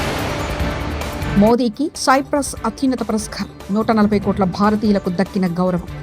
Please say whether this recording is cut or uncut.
cut